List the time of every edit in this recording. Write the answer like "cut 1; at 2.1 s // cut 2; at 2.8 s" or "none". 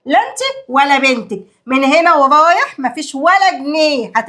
none